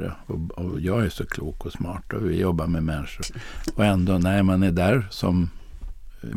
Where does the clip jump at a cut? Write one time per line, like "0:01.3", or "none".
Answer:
0:03.3